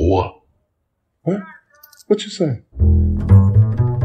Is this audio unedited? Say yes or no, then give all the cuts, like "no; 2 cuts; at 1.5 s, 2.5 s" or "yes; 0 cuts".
no; 1 cut; at 2.7 s